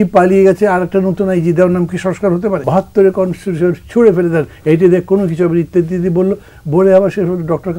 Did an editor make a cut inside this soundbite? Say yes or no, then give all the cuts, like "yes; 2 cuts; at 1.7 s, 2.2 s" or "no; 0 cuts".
yes; 1 cut; at 2.6 s